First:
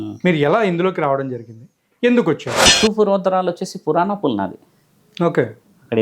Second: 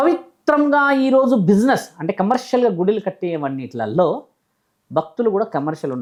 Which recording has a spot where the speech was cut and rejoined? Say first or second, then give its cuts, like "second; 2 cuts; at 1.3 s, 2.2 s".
first; 1 cut; at 2.6 s